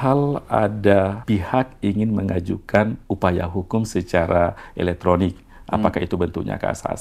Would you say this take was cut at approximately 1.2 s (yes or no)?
yes